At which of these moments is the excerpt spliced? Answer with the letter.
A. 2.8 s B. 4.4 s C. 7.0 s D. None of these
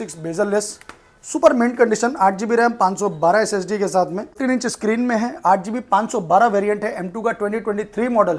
B